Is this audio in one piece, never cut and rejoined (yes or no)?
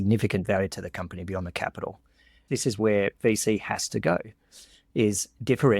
no